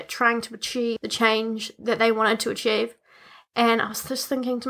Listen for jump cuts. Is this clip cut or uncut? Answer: cut